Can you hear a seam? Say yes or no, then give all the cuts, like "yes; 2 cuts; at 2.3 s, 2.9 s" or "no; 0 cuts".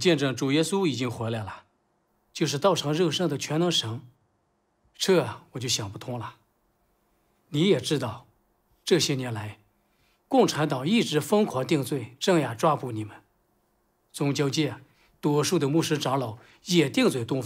yes; 1 cut; at 11.9 s